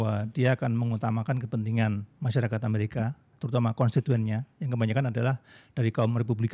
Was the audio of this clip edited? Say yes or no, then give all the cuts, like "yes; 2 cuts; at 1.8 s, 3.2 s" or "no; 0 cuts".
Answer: no; 0 cuts